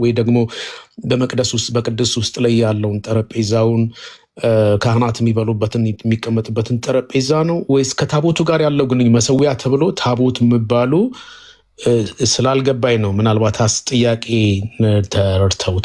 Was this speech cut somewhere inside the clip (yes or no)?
no